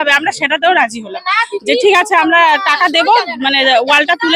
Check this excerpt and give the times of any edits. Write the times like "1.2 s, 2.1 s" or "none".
none